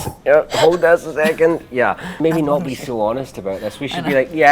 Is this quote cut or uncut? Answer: cut